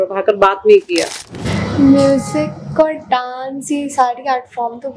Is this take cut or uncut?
cut